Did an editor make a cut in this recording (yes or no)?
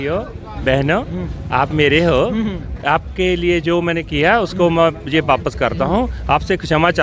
no